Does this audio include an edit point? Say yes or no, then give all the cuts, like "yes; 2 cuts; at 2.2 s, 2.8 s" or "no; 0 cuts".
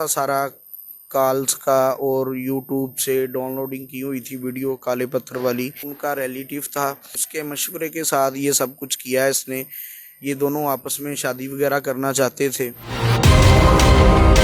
yes; 3 cuts; at 5.8 s, 7.2 s, 12.9 s